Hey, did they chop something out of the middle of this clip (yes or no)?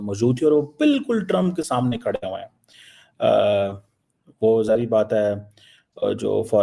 no